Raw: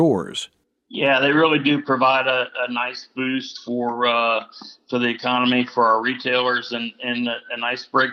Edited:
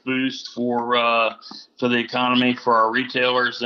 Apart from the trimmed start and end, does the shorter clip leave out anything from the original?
no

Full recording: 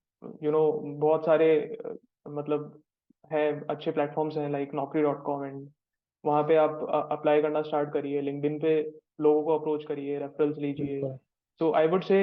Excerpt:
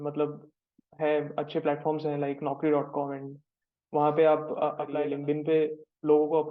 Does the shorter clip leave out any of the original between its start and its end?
yes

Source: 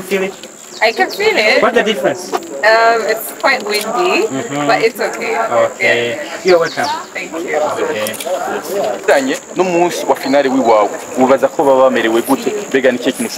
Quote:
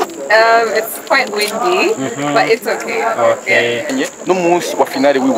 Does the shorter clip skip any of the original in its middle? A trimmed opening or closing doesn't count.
yes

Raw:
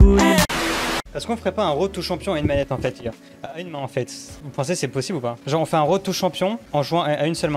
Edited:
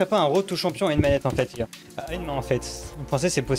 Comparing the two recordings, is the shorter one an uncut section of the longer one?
yes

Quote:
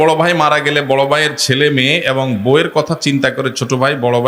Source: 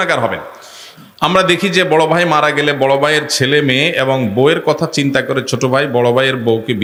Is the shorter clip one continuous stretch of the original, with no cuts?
yes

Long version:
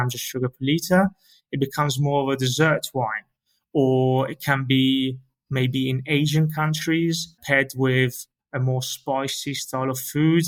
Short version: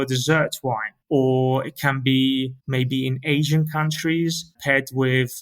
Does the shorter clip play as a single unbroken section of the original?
no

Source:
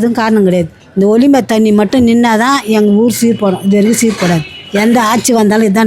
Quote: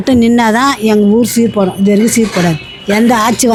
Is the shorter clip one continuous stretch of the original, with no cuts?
yes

